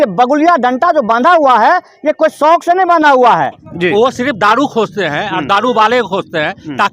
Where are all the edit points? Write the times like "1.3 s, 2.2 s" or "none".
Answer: 3.6 s

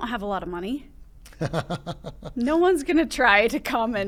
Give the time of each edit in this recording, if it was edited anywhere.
none

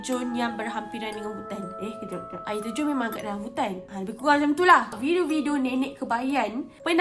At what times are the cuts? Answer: 4.9 s

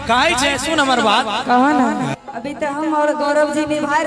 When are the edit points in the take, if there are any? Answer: 2.1 s

